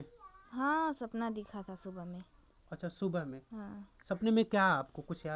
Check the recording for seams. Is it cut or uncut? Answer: uncut